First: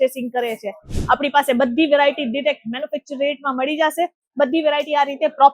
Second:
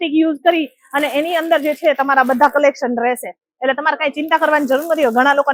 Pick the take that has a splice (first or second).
first